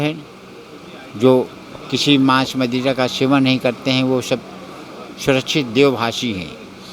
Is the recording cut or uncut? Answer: uncut